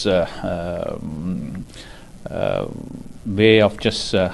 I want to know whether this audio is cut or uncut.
uncut